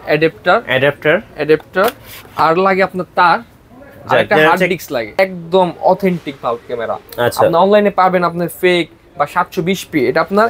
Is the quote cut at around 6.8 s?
no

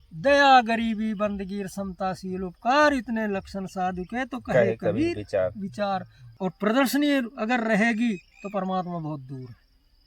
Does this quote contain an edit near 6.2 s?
yes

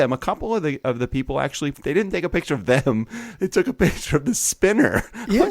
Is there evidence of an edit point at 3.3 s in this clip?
no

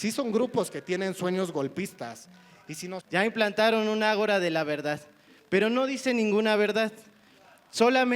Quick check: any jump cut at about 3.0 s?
yes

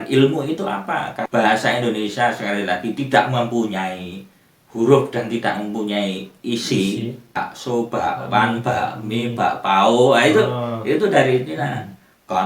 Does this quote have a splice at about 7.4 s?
yes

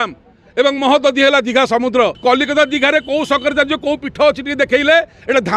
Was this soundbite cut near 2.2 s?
yes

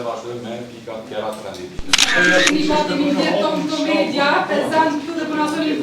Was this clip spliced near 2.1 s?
yes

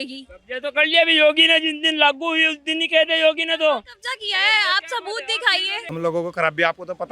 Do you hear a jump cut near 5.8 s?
yes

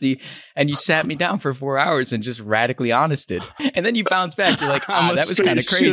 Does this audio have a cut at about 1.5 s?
no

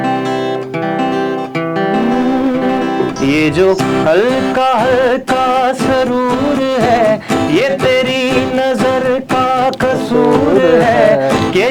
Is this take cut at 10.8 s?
no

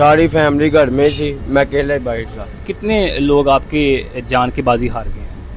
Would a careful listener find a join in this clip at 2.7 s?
yes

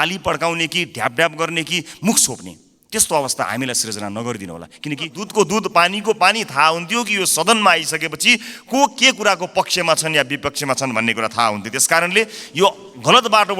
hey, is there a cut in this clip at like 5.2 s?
yes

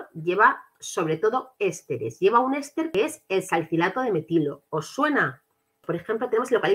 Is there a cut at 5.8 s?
yes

